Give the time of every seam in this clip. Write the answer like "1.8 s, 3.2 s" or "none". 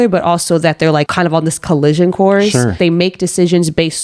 1.1 s, 2.7 s